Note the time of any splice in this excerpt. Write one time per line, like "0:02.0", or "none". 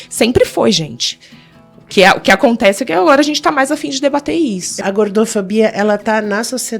0:04.8